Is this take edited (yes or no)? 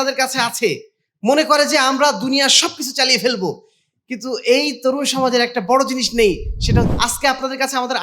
yes